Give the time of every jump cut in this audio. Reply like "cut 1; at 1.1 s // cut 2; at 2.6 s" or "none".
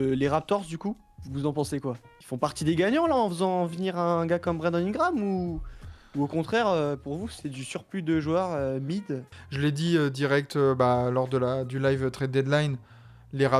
cut 1; at 2.1 s // cut 2; at 9.3 s